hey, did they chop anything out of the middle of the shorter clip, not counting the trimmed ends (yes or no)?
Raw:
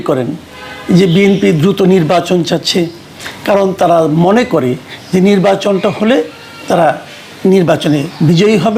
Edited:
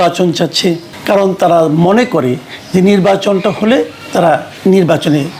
yes